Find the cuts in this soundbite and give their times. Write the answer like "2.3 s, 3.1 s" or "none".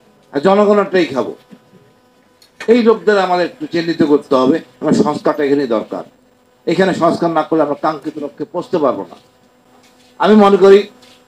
none